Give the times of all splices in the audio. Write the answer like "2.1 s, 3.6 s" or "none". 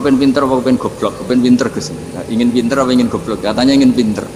none